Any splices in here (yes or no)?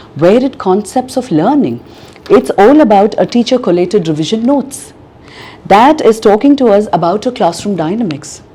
no